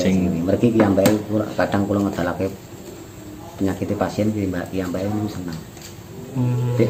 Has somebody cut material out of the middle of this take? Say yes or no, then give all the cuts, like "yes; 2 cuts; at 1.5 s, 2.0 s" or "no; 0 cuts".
no; 0 cuts